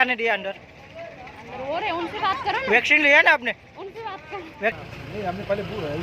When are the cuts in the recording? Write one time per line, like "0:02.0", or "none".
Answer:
0:04.8